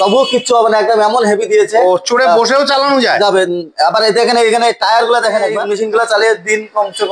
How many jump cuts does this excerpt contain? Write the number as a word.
one